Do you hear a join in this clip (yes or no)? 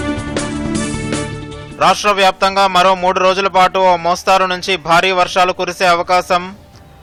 no